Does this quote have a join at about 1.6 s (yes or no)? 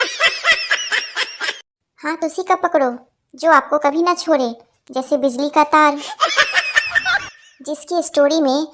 no